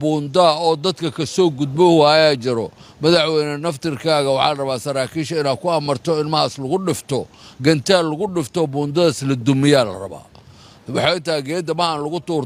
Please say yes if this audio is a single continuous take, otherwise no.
yes